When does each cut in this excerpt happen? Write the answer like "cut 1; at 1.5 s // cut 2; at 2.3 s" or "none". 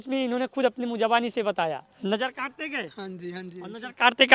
cut 1; at 1.9 s